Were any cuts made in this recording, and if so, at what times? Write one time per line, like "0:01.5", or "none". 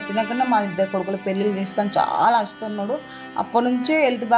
none